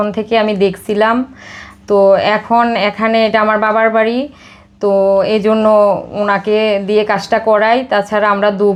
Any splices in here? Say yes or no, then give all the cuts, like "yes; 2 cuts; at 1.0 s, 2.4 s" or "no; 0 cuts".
no; 0 cuts